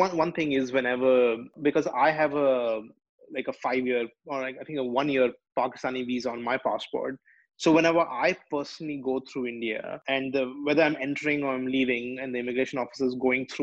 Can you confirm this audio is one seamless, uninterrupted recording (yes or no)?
no